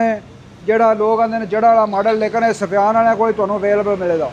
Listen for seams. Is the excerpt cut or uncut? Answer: uncut